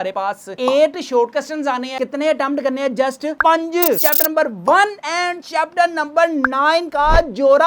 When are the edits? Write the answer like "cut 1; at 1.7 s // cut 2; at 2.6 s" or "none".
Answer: cut 1; at 1.9 s // cut 2; at 4.0 s